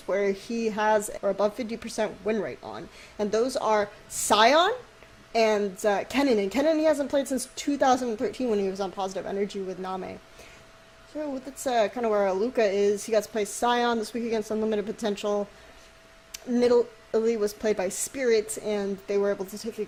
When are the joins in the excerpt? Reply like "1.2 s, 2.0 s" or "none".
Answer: none

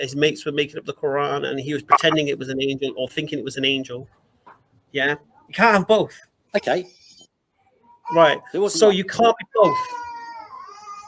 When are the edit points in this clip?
6.4 s

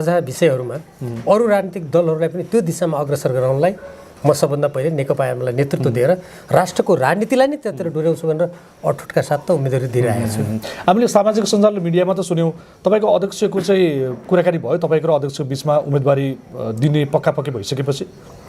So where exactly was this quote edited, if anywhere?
none

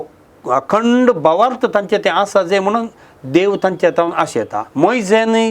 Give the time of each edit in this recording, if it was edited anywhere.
4.6 s

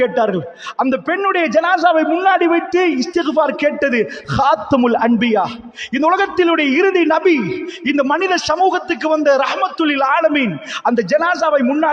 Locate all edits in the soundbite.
none

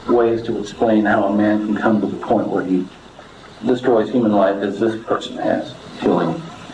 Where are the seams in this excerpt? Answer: 5.8 s

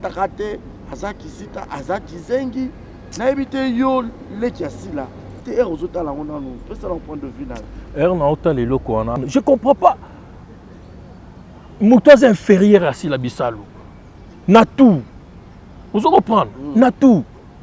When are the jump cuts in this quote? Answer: 5.4 s, 9.2 s

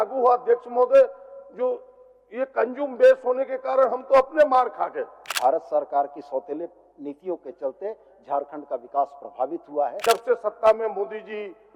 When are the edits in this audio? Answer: 5.2 s, 10.0 s

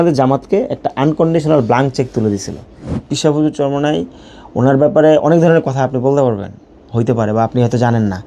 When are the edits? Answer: 2.8 s

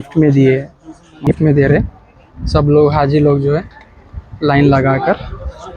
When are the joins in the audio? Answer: 1.1 s

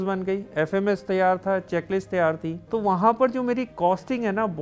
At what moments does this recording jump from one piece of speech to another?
2.5 s, 3.7 s

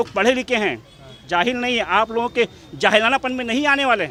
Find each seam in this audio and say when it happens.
none

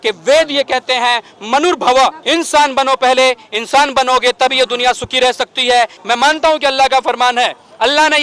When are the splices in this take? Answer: 2.2 s, 6.0 s

